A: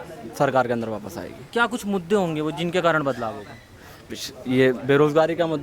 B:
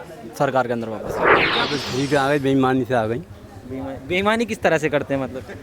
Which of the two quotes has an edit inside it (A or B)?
B